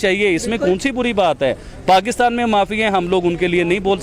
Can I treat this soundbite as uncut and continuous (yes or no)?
yes